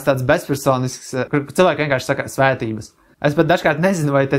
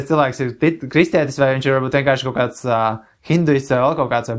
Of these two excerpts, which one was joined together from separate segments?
first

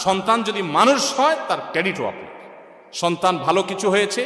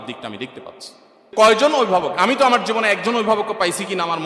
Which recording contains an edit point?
second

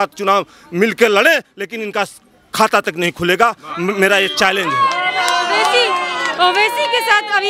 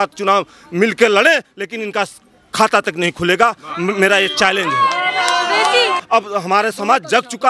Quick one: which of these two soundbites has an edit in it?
second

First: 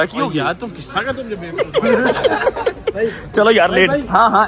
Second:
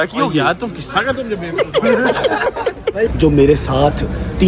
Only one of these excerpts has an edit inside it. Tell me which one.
second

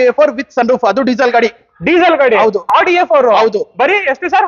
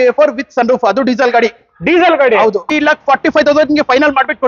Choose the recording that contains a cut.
second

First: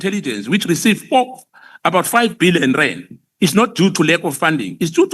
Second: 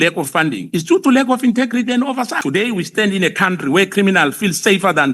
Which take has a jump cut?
second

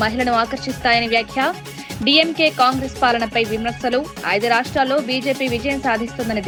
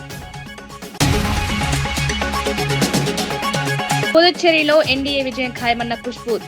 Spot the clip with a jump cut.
second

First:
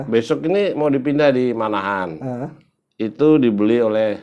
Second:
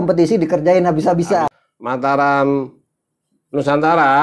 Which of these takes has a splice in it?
second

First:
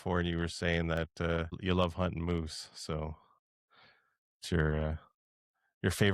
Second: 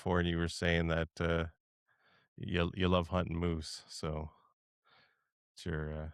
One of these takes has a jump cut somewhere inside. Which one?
first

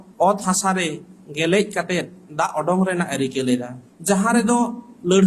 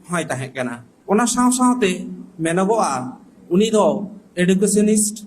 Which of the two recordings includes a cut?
second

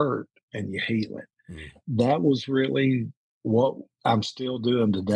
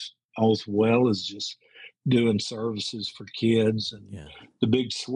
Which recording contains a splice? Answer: first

